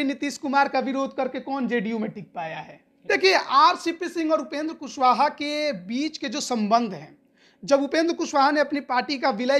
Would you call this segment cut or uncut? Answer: cut